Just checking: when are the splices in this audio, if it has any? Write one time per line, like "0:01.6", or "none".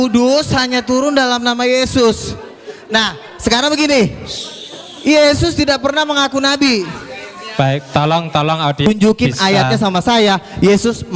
0:08.9